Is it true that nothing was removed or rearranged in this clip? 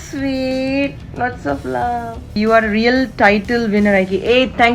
no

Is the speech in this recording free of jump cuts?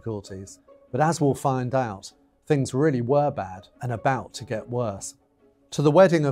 no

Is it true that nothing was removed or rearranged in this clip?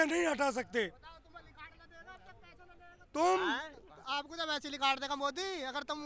yes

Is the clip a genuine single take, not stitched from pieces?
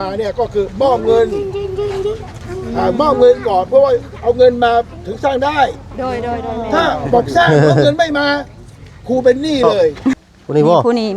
no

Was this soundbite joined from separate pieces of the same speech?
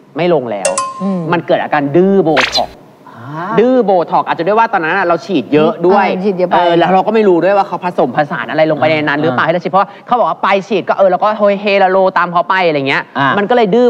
no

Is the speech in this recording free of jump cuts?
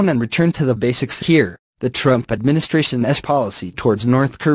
yes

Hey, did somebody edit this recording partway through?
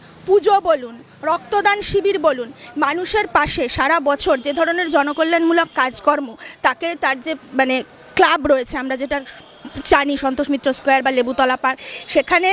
no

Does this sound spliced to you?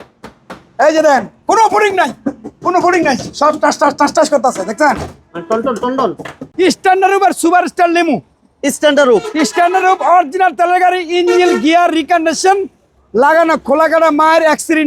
yes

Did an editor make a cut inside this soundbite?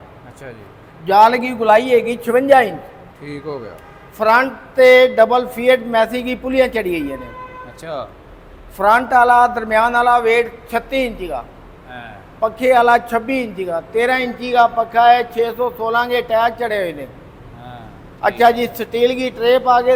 no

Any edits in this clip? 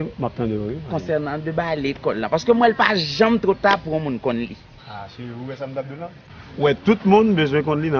yes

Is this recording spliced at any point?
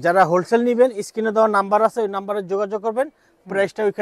no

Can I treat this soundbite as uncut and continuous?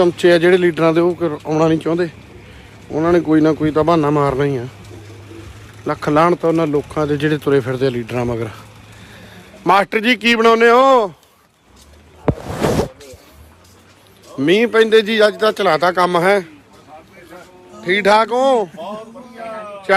yes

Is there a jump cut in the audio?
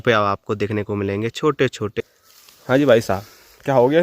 yes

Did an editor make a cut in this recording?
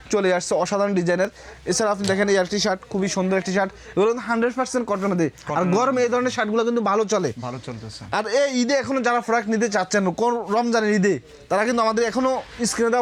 no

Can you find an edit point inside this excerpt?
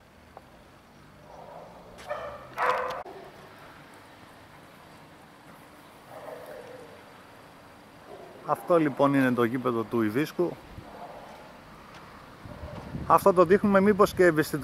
yes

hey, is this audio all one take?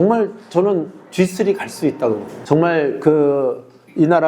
no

